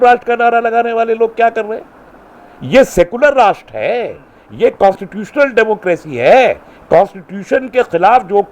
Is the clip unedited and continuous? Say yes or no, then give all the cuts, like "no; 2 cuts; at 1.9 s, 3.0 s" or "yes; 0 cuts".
yes; 0 cuts